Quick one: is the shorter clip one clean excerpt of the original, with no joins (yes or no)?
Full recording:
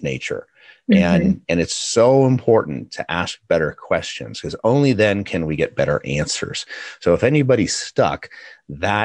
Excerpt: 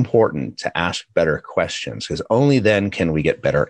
yes